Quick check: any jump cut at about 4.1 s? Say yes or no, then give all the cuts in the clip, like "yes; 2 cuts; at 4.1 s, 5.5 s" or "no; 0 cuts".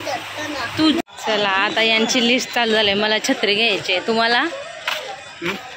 no; 1 cut; at 1.0 s